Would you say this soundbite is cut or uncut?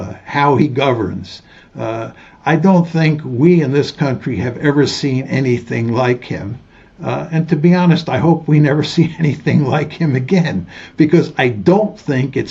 uncut